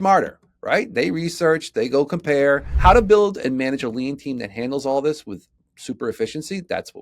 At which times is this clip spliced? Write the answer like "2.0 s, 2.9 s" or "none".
2.7 s